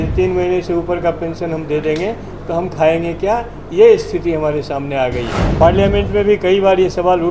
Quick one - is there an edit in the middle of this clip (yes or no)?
yes